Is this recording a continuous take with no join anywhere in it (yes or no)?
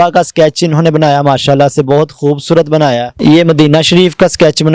no